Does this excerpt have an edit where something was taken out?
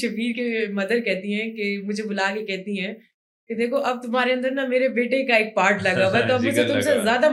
no; 0 cuts

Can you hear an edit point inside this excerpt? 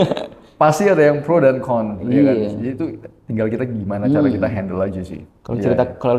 no; 0 cuts

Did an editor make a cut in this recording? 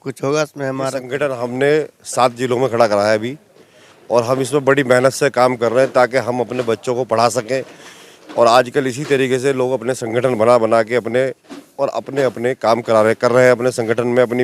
yes; 1 cut; at 1.0 s

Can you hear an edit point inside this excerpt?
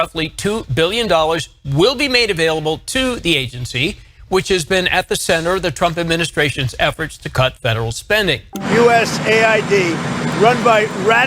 yes; 1 cut; at 8.5 s

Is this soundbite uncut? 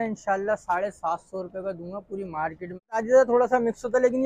no; 1 cut; at 3.0 s

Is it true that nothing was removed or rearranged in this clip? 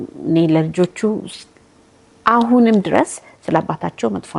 yes; 0 cuts

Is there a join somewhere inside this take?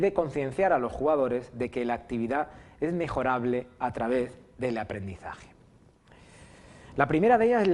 yes; 1 cut; at 0.9 s

